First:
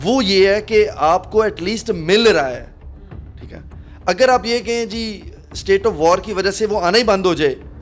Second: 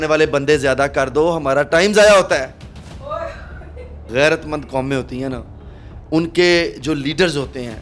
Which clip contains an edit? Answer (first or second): second